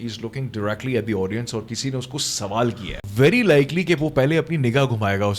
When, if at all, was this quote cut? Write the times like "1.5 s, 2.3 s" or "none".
3.0 s